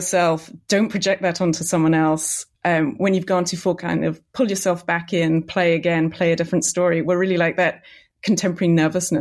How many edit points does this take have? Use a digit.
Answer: 1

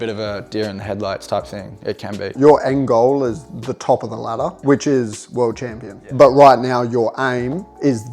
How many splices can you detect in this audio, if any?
3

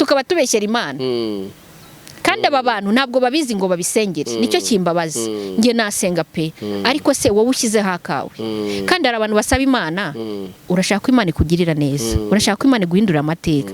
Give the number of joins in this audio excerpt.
0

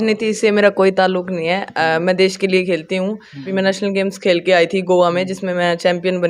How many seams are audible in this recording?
1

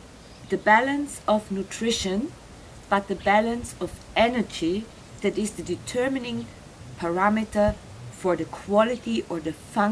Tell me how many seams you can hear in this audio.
0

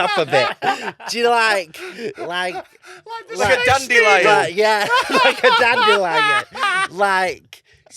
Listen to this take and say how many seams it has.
0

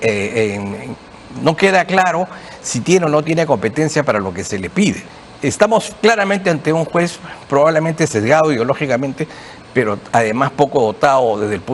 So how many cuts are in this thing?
1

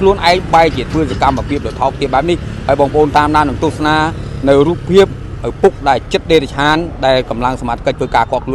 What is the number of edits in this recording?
0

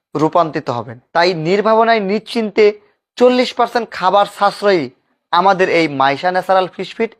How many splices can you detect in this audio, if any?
1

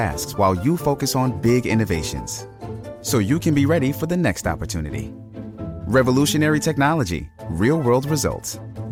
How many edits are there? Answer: 0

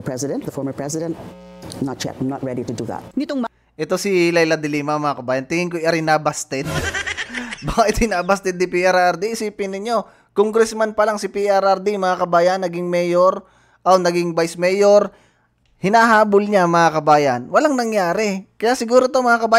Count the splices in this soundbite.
0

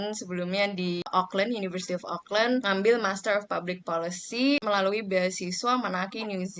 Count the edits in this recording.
3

